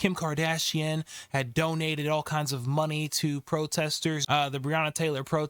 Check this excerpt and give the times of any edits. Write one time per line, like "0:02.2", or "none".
0:04.2